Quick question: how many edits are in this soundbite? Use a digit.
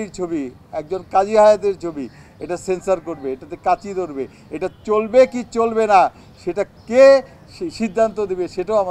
0